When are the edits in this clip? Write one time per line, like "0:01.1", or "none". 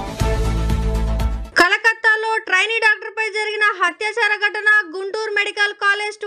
0:01.4

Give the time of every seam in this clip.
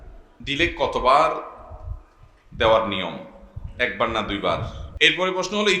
0:04.8

